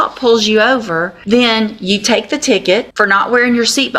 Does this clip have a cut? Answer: yes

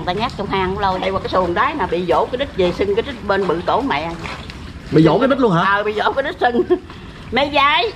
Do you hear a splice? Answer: yes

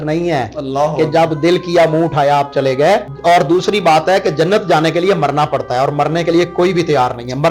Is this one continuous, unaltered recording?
yes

